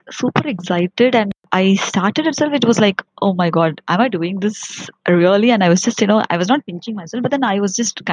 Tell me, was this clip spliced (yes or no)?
yes